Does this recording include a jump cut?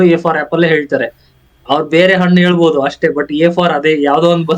no; 0 cuts

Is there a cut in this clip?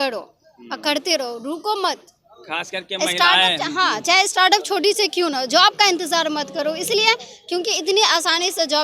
no; 0 cuts

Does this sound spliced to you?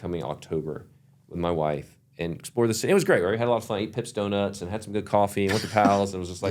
no; 0 cuts

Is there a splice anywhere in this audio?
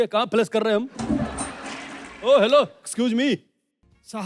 yes; 1 cut; at 2.1 s

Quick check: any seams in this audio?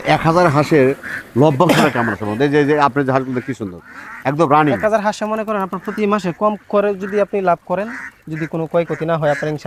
no; 0 cuts

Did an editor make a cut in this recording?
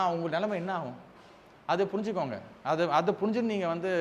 no; 0 cuts

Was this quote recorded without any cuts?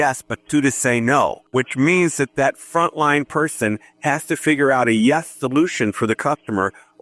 no; 1 cut; at 1.4 s

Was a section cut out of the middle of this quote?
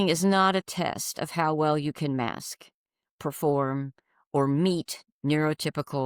no; 0 cuts

